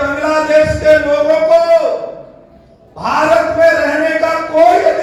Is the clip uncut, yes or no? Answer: yes